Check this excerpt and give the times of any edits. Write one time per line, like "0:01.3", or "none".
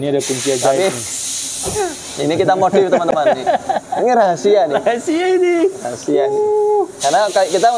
none